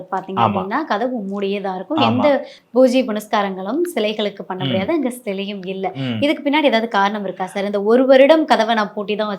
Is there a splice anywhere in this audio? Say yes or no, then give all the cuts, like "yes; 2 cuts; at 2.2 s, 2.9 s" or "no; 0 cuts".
no; 0 cuts